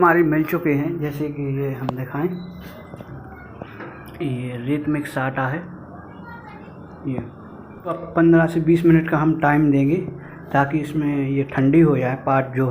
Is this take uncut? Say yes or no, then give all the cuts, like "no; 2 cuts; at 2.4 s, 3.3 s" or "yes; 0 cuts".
no; 1 cut; at 8.0 s